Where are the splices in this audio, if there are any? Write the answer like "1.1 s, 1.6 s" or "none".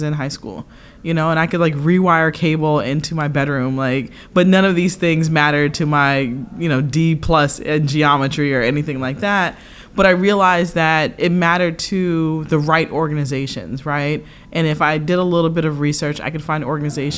none